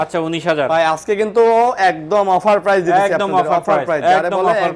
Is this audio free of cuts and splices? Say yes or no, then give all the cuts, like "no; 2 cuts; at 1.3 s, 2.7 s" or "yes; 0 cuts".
yes; 0 cuts